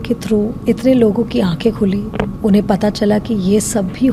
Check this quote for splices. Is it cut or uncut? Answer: uncut